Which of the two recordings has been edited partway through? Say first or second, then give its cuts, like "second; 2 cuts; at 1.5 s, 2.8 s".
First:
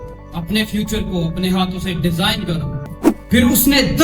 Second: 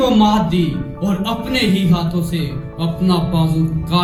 first; 1 cut; at 2.9 s